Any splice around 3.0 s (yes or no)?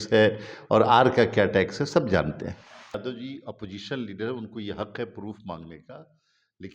yes